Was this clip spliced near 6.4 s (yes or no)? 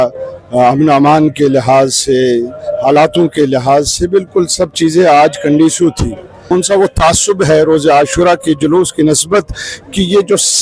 yes